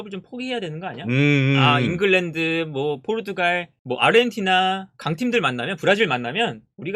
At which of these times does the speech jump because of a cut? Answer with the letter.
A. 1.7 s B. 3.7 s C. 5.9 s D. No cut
B